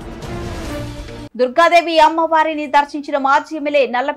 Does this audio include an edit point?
yes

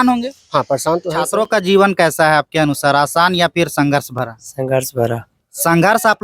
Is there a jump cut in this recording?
yes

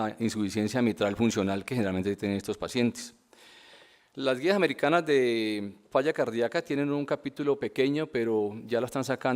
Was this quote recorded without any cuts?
no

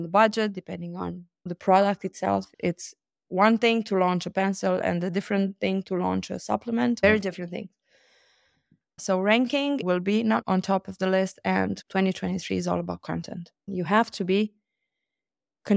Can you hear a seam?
yes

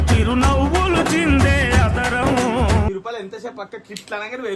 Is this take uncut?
no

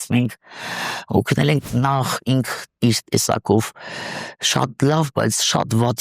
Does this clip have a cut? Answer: yes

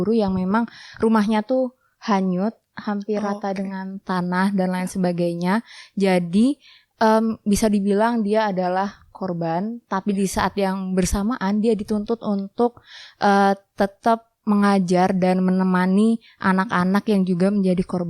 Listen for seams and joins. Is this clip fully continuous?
yes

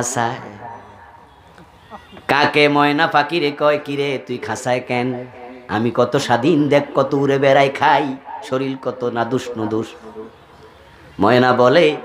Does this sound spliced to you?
no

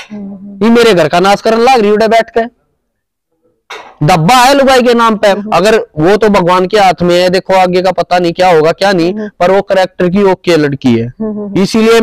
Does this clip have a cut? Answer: yes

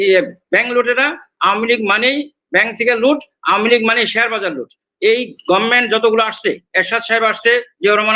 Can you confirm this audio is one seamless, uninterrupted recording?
yes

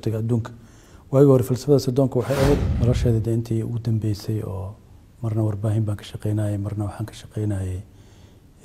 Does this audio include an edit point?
yes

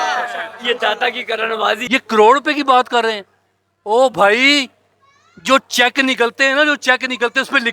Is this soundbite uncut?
no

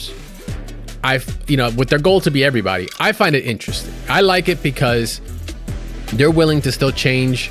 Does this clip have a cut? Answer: no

